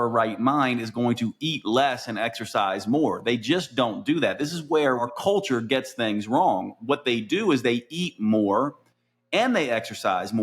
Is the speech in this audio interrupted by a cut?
yes; 1 cut; at 5.0 s

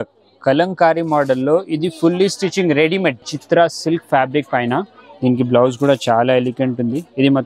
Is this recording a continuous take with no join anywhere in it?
no; 1 cut; at 3.3 s

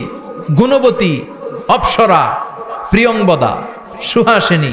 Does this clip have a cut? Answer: no; 0 cuts

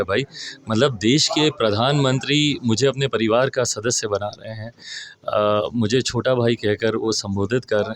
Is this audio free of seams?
yes; 0 cuts

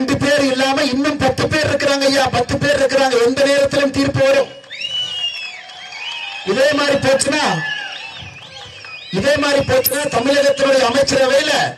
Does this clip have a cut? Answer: no; 0 cuts

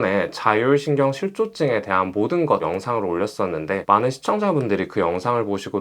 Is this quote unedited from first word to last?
no; 1 cut; at 2.6 s

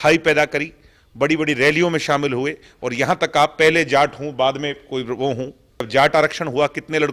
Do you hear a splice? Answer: yes; 1 cut; at 5.9 s

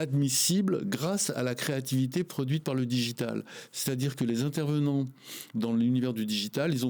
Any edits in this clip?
no; 0 cuts

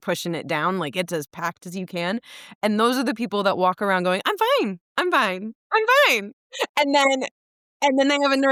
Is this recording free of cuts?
yes; 0 cuts

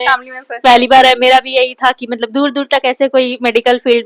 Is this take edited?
no; 0 cuts

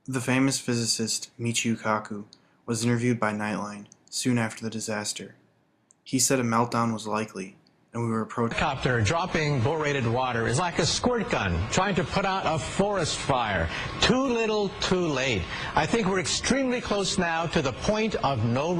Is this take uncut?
yes; 0 cuts

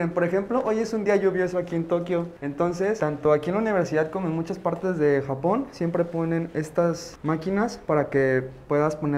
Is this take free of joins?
yes; 0 cuts

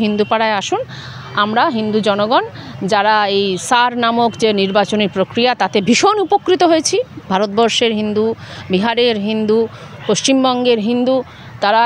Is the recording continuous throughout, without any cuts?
yes; 0 cuts

